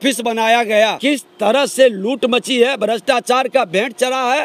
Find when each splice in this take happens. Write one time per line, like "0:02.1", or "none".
0:01.0